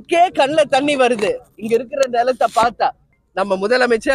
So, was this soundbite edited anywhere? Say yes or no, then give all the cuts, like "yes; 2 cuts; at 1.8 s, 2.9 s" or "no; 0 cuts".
yes; 1 cut; at 3.2 s